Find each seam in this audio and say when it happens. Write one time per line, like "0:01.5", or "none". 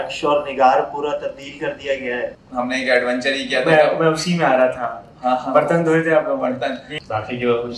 0:02.3
0:06.9